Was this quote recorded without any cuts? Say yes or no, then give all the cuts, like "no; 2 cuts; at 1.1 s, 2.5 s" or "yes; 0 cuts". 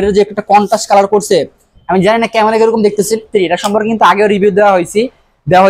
no; 1 cut; at 3.2 s